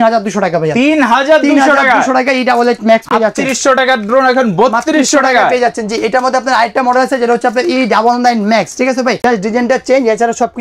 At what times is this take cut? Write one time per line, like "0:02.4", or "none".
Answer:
none